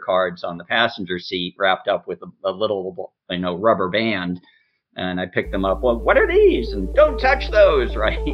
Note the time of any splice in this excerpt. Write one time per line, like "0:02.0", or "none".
none